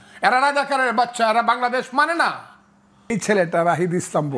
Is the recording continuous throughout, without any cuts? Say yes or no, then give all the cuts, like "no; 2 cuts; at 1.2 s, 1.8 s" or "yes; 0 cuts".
no; 1 cut; at 3.1 s